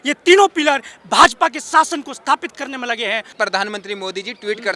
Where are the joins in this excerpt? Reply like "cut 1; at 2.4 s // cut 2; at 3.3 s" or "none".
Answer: cut 1; at 3.3 s